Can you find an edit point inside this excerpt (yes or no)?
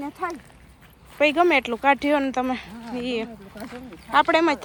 no